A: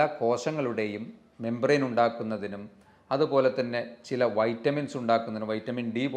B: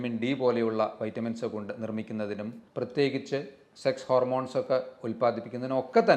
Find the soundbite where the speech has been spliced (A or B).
B